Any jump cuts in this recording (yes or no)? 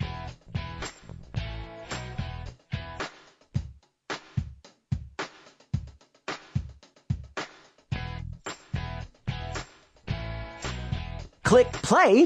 yes